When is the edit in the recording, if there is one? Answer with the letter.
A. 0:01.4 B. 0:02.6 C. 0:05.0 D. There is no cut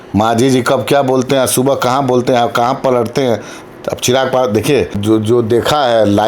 C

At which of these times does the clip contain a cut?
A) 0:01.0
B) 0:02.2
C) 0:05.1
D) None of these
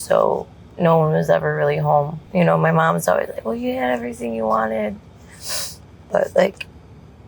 B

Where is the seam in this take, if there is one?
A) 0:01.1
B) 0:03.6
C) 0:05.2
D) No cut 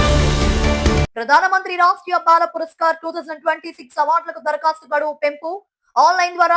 A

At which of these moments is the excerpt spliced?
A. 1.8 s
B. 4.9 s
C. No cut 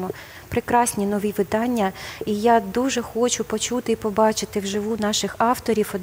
C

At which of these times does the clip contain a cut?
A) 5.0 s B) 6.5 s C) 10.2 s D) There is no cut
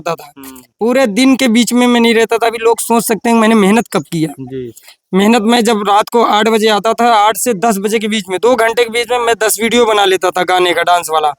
D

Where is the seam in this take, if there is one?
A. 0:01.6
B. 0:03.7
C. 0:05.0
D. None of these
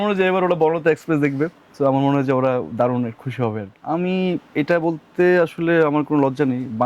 B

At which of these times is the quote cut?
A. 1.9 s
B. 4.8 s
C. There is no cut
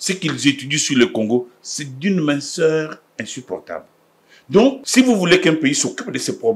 B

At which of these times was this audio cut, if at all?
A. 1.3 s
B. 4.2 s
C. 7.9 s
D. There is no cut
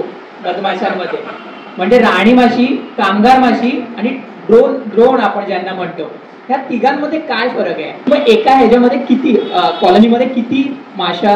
D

